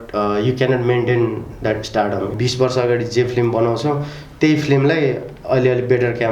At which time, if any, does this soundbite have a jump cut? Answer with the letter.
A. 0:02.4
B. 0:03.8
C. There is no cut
A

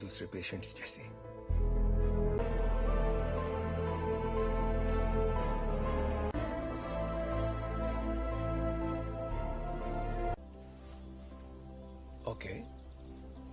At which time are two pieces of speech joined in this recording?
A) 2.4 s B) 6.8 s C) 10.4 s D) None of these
A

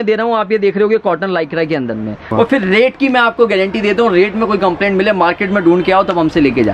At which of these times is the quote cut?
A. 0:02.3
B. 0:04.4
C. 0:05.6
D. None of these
A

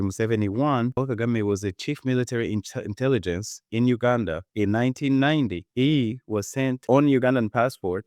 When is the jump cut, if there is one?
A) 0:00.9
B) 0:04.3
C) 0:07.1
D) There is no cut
A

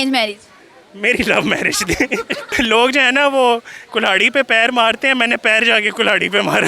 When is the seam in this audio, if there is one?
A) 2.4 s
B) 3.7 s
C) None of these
A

